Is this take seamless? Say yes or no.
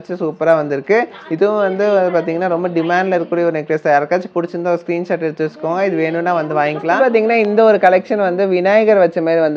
no